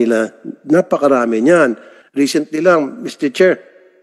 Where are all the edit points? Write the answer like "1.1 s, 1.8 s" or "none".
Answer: none

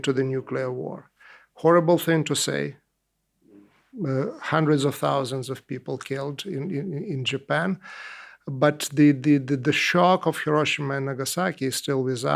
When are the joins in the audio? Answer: none

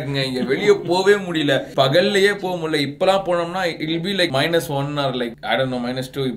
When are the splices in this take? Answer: none

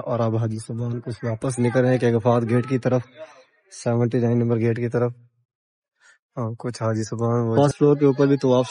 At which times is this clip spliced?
7.5 s

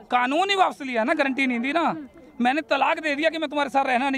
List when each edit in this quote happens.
none

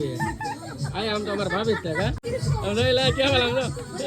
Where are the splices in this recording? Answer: 2.2 s

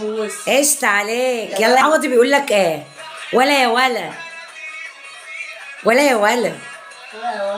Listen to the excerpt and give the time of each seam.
1.8 s

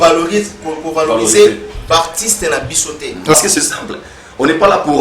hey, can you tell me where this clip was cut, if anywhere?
3.3 s

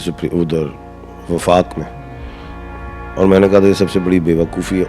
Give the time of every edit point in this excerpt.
none

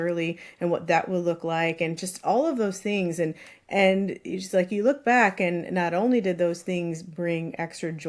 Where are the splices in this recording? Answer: none

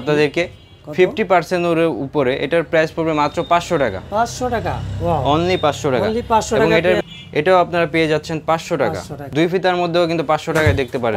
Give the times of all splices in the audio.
7.0 s, 9.2 s

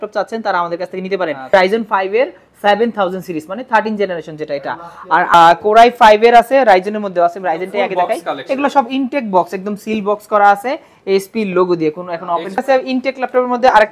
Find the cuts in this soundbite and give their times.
1.5 s, 5.3 s, 12.6 s

